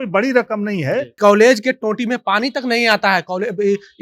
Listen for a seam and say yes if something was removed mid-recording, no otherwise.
yes